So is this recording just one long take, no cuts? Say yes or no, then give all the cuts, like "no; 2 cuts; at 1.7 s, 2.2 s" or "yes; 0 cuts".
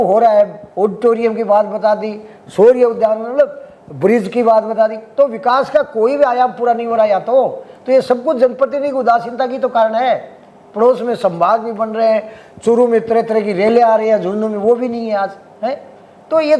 yes; 0 cuts